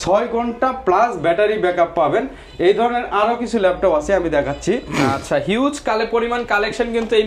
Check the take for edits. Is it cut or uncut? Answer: uncut